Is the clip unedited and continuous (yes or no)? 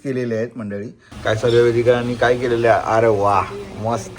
no